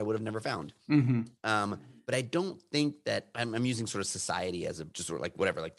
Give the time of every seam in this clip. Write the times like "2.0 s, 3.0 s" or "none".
1.9 s, 3.3 s, 4.9 s